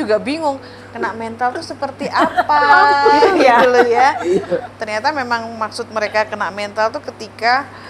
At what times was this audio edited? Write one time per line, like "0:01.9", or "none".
0:04.7